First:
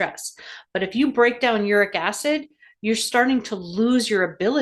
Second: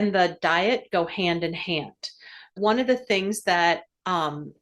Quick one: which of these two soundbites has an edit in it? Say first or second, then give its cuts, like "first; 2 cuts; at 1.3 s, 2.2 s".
second; 1 cut; at 2.6 s